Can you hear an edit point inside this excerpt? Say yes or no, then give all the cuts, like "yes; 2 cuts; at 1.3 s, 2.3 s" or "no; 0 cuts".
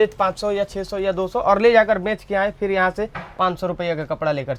no; 0 cuts